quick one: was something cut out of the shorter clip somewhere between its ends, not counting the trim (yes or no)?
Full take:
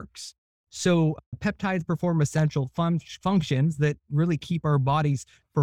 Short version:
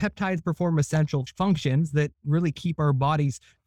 yes